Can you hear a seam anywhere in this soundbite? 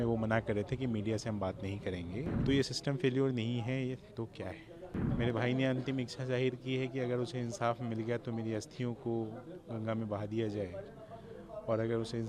yes; 2 cuts; at 2.3 s, 5.1 s

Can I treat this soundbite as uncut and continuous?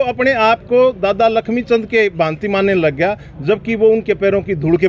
yes; 0 cuts

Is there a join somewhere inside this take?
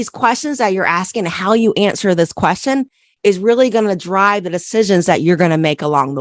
no; 0 cuts

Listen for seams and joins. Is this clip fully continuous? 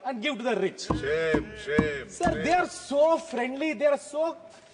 yes; 0 cuts

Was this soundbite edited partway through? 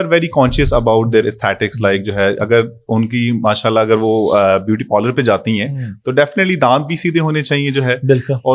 no; 0 cuts

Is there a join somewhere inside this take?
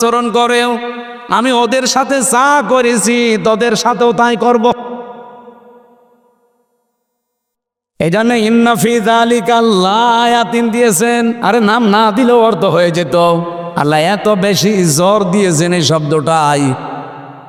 no; 0 cuts

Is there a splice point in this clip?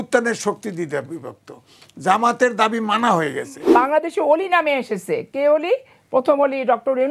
yes; 1 cut; at 3.7 s

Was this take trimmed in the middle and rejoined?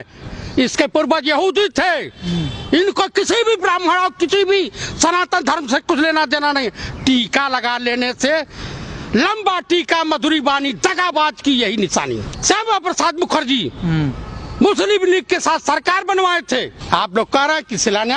yes; 1 cut; at 12.3 s

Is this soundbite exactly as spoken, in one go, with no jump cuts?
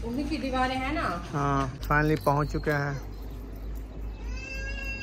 no; 1 cut; at 1.9 s

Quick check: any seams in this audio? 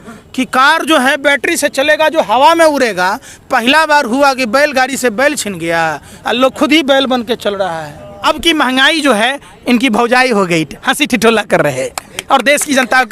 yes; 1 cut; at 8.1 s

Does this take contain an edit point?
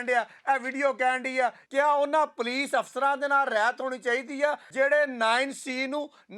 yes; 2 cuts; at 1.6 s, 4.7 s

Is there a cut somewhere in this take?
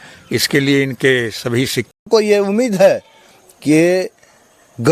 yes; 1 cut; at 2.0 s

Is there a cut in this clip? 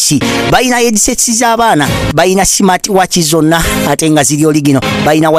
no; 0 cuts

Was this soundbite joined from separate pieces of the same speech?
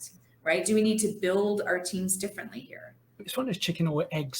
yes; 1 cut; at 3.3 s

